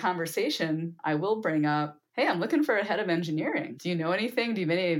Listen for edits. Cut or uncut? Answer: cut